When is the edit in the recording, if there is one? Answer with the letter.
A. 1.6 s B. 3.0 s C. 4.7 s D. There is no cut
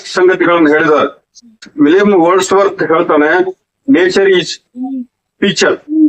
A